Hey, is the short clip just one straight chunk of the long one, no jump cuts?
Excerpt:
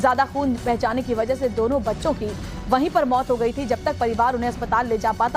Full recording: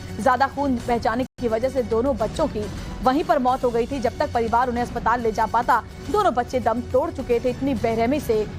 no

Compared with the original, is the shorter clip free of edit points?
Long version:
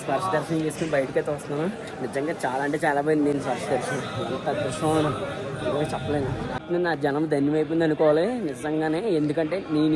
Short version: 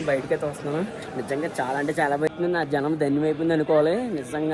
no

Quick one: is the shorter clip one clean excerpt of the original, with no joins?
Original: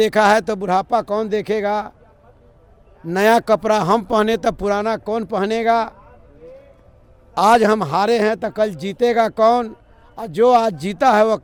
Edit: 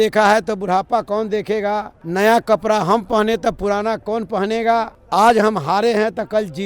no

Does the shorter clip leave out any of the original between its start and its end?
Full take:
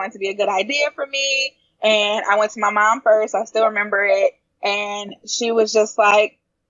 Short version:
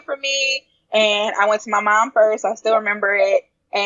no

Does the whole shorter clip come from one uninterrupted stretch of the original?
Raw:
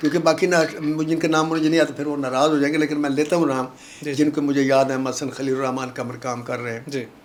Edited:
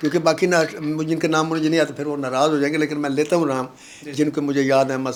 yes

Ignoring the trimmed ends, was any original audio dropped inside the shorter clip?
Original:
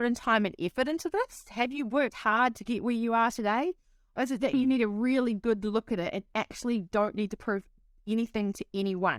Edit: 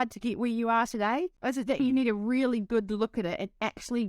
yes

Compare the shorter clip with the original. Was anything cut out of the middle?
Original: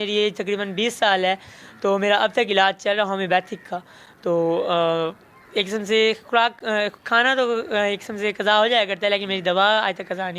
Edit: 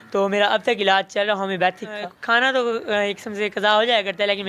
yes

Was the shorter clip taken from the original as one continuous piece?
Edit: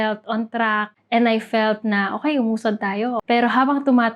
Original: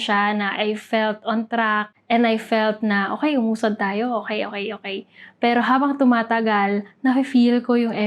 no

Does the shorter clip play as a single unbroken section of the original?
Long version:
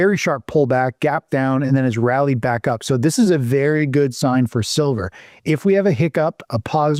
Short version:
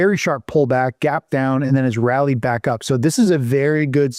yes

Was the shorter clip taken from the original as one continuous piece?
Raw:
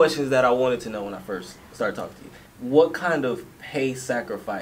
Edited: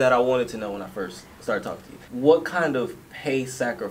no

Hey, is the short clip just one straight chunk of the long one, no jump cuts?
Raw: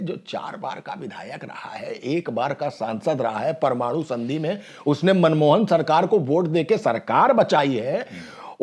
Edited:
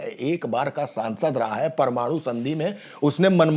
yes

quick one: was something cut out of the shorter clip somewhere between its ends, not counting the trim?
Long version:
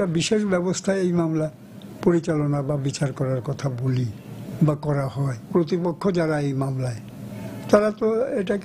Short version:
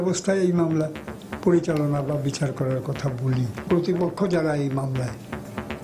yes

